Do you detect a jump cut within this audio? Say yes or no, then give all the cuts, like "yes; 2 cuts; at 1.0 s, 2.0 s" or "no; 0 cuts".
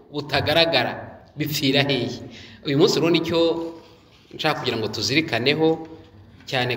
no; 0 cuts